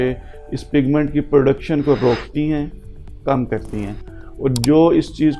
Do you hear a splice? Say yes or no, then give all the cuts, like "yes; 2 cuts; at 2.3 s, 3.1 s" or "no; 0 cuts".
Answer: no; 0 cuts